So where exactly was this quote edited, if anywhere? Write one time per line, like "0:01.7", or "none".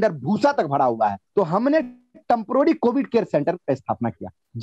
0:01.2